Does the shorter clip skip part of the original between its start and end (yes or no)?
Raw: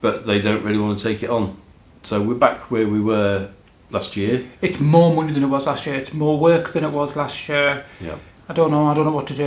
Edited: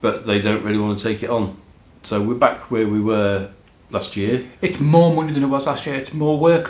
no